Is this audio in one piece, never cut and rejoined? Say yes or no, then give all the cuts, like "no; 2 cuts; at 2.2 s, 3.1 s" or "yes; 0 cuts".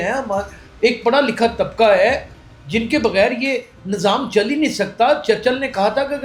yes; 0 cuts